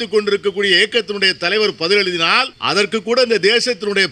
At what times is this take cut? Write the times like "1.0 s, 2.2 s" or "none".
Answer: 2.5 s